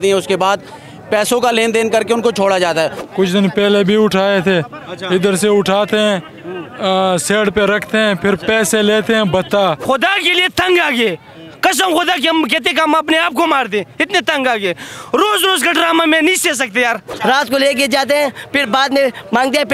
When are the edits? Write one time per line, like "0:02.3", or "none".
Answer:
0:03.0
0:09.8
0:17.1